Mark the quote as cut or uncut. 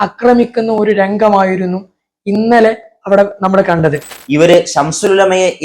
cut